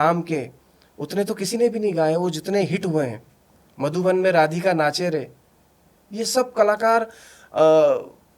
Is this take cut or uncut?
uncut